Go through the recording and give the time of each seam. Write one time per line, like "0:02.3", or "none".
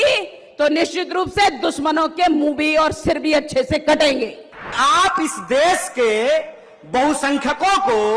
0:04.7